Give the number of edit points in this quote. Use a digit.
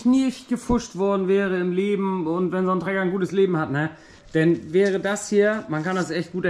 0